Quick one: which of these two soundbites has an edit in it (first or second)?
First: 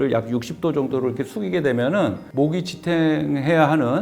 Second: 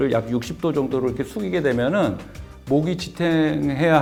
first